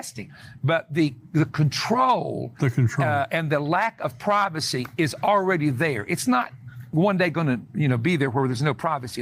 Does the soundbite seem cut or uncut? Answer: uncut